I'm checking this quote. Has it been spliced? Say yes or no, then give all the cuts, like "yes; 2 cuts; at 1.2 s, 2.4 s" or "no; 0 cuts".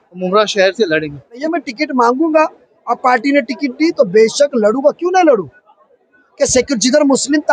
yes; 1 cut; at 1.4 s